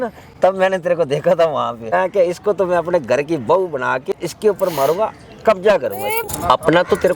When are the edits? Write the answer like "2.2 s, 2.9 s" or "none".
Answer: 1.9 s, 4.1 s, 6.2 s